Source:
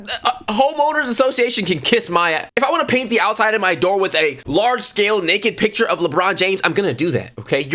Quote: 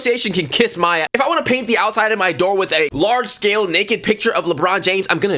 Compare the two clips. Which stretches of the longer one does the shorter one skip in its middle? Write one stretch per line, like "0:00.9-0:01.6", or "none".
0:02.4-0:02.5
0:04.3-0:04.5